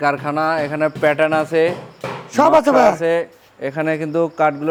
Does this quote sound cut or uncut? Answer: uncut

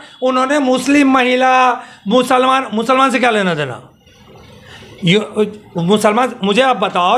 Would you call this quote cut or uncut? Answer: uncut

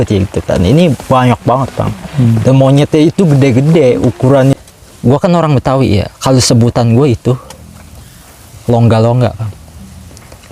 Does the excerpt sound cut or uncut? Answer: cut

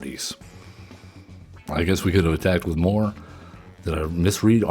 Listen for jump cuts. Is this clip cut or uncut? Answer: cut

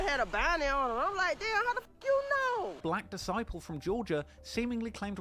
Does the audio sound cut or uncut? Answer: cut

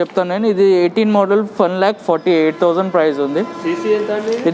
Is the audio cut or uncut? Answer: uncut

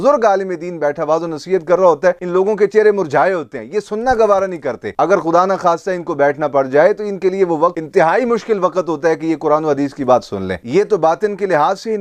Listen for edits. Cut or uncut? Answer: uncut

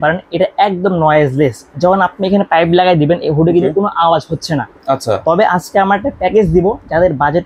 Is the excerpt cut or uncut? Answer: uncut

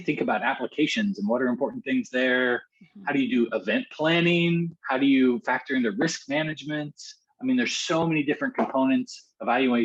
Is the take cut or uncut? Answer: uncut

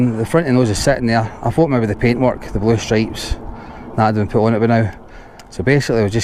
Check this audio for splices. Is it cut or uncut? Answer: uncut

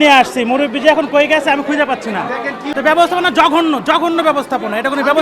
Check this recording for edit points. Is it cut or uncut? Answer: cut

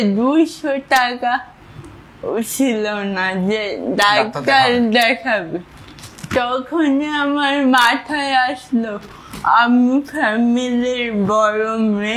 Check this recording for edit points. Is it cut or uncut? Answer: uncut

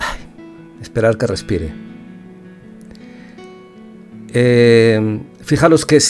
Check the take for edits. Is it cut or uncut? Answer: uncut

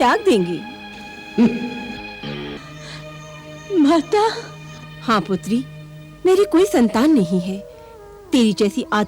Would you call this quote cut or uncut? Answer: cut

